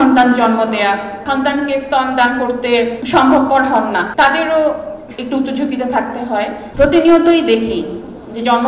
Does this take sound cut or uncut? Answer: cut